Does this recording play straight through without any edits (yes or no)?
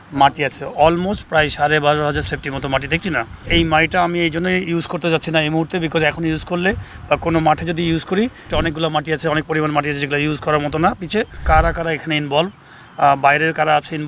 no